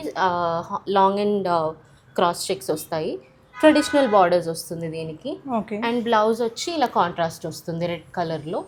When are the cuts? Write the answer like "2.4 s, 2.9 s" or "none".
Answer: none